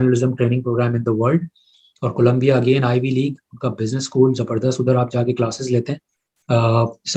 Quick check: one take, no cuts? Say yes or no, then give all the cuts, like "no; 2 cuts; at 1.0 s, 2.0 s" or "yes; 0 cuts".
yes; 0 cuts